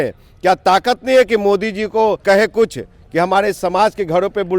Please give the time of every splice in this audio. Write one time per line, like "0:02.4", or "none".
0:02.2